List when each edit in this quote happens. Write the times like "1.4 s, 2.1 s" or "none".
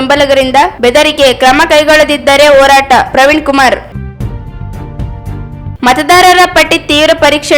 3.9 s, 5.4 s